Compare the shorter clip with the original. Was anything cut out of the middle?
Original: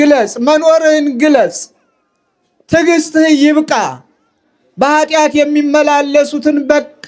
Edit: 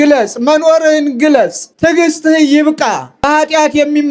yes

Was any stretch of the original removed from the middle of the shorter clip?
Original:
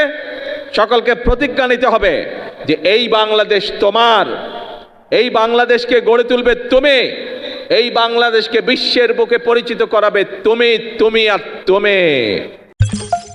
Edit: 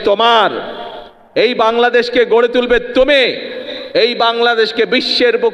no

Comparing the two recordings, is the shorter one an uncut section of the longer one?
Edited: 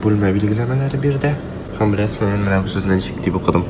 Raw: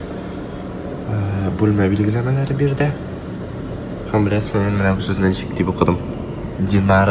no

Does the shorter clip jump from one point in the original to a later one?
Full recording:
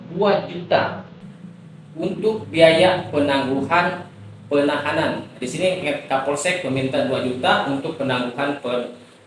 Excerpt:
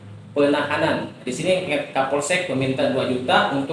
no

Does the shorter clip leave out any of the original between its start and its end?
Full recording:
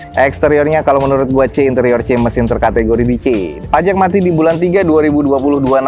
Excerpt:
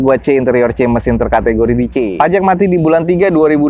yes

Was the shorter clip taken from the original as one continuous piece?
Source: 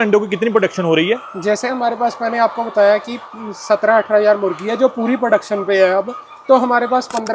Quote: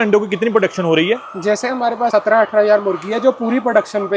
no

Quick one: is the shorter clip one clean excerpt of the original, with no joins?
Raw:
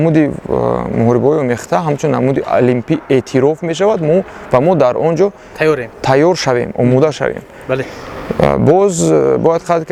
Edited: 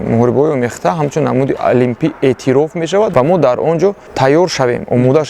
no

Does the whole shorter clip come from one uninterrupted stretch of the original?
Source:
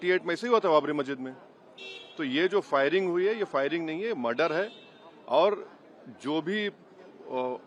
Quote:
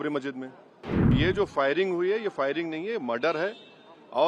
no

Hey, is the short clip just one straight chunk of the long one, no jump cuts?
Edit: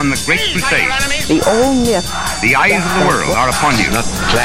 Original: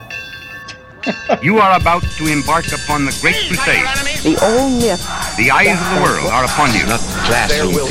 yes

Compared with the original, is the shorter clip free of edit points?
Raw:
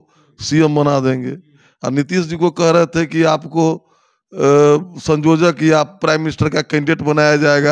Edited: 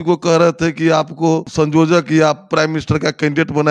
no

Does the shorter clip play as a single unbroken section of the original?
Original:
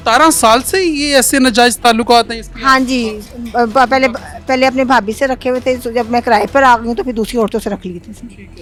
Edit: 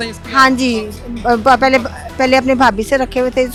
yes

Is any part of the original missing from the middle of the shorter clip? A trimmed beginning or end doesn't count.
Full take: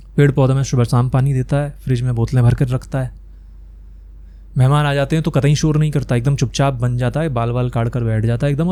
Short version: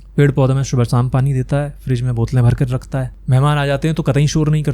yes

